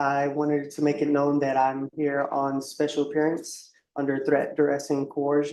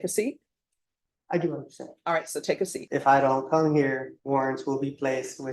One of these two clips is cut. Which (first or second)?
second